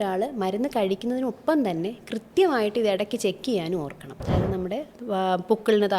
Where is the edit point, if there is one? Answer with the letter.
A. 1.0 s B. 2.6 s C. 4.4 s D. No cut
C